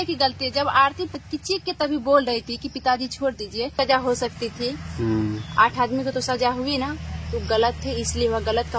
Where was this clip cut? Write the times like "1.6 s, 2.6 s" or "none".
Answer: 1.1 s, 3.7 s